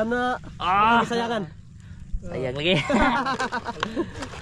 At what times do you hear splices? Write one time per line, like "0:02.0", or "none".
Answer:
none